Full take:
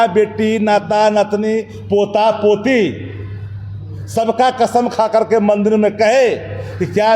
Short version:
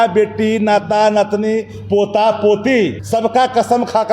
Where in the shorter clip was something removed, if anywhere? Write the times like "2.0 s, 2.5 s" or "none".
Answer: 3.0 s